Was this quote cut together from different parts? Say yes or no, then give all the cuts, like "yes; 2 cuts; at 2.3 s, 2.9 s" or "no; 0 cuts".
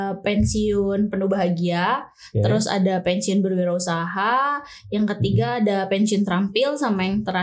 no; 0 cuts